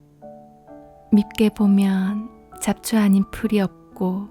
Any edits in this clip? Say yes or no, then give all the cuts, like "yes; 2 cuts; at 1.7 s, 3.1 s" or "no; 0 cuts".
yes; 1 cut; at 1.1 s